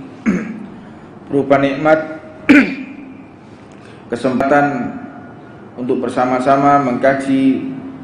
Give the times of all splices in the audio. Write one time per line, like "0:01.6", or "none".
0:04.4